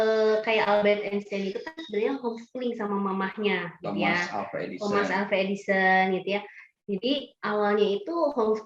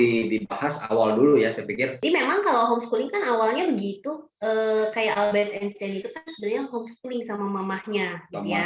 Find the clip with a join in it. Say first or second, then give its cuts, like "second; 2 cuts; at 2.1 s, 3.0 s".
second; 1 cut; at 1.9 s